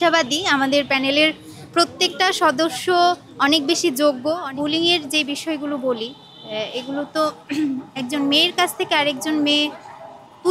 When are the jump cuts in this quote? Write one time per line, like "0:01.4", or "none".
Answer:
0:04.4